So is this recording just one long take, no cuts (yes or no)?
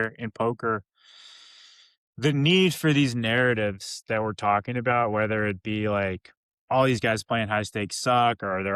yes